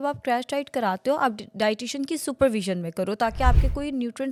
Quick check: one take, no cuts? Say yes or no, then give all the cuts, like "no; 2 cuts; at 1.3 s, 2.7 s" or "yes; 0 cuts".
yes; 0 cuts